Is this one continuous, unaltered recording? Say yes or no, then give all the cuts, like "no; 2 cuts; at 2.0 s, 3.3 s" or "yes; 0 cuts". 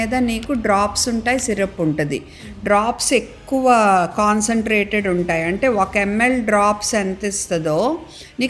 yes; 0 cuts